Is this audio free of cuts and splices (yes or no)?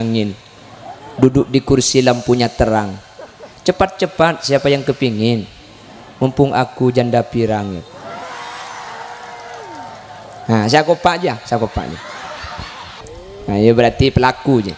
no